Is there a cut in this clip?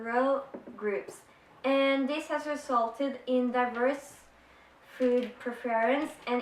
yes; 1 cut; at 5.3 s

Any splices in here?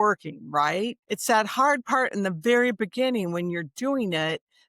yes; 1 cut; at 1.1 s

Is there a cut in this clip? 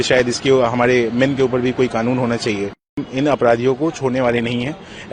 yes; 1 cut; at 3.0 s

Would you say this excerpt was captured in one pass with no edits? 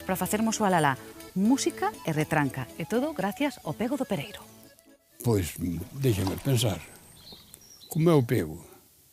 no; 1 cut; at 5.4 s

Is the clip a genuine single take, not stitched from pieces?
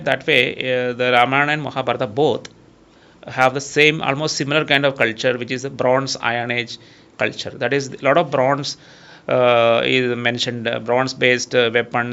yes; 0 cuts

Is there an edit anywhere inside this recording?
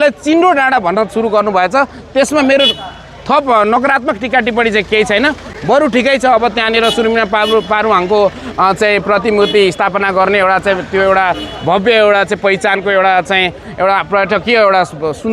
no; 0 cuts

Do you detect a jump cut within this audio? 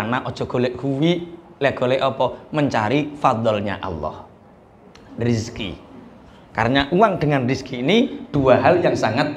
no; 0 cuts

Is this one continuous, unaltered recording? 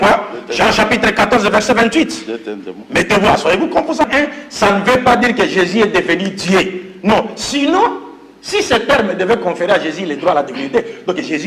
no; 1 cut; at 4.1 s

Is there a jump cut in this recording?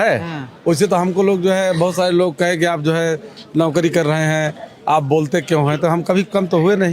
no; 0 cuts

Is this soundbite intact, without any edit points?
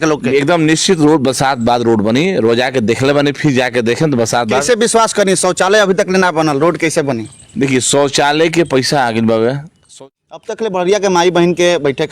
no; 1 cut; at 9.9 s

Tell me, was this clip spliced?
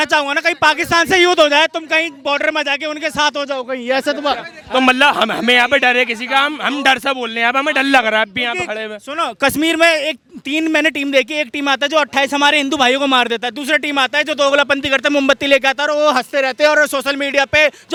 no; 0 cuts

